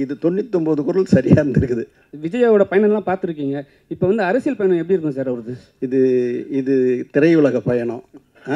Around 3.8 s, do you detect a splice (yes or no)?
no